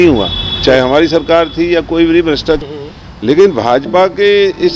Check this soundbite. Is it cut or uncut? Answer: cut